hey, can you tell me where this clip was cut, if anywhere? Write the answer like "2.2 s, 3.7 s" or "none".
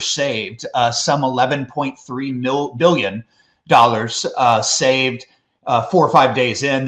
none